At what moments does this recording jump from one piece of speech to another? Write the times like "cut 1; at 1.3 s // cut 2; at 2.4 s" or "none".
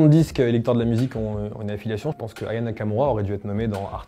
cut 1; at 2.2 s